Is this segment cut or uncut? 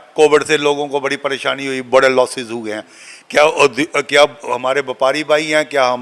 uncut